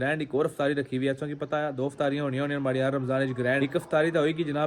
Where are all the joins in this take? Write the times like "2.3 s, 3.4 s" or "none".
3.6 s